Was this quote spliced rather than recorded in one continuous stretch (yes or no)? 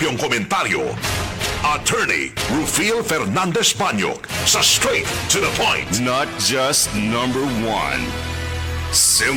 no